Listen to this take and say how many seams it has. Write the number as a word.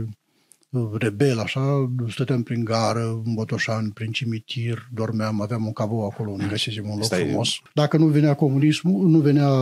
one